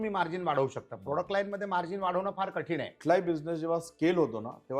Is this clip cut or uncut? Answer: cut